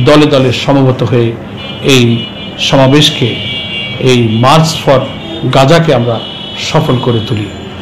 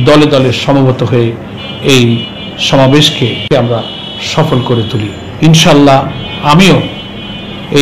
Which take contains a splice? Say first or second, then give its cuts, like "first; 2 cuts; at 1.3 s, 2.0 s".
second; 2 cuts; at 3.5 s, 5.2 s